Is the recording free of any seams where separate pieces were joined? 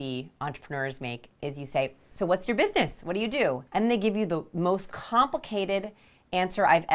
no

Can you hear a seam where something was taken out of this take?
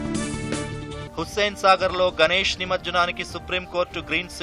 yes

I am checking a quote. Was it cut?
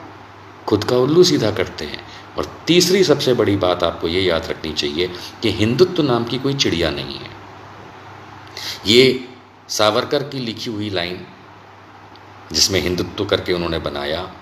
no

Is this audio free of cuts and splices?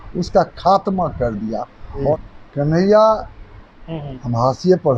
no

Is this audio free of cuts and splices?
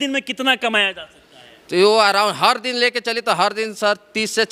yes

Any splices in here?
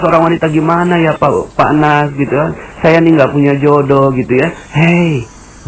no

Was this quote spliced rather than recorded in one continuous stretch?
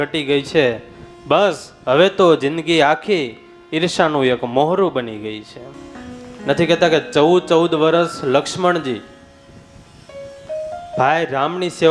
yes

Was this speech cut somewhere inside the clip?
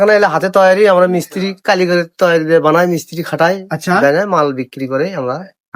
no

